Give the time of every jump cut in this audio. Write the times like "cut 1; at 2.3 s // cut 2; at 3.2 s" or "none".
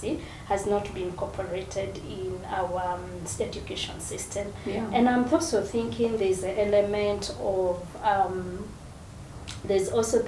none